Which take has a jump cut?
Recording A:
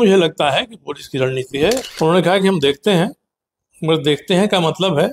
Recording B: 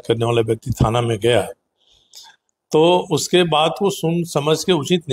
A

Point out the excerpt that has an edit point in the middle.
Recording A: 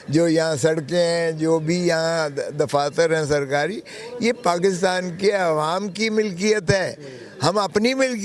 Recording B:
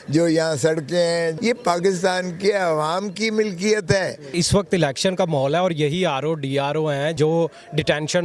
B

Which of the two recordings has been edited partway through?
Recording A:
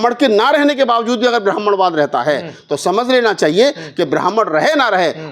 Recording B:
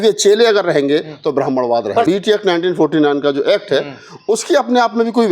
B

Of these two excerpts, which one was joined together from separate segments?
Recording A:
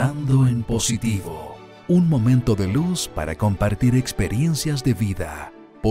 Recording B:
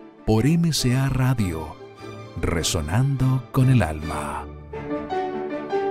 B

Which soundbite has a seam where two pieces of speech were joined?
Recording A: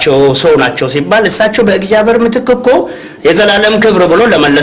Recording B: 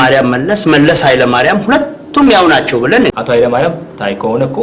B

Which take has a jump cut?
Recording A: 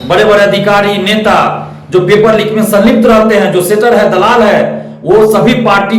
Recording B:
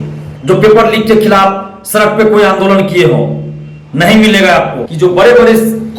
B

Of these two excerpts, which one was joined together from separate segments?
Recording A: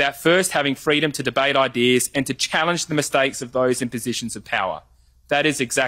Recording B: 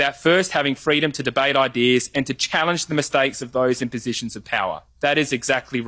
B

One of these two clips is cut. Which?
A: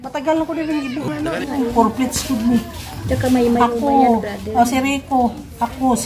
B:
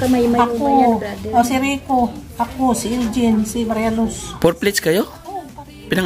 A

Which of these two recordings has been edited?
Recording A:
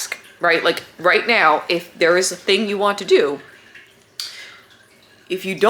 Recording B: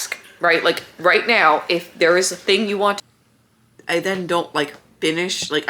B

